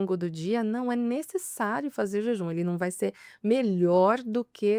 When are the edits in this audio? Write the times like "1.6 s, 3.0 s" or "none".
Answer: none